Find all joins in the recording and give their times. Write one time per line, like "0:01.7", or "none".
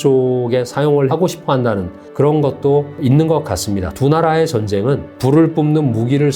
0:01.0
0:02.0
0:02.9
0:05.1